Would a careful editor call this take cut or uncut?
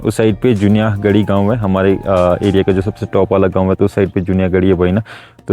uncut